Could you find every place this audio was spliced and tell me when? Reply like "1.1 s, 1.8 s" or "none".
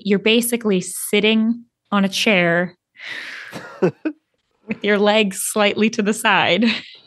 none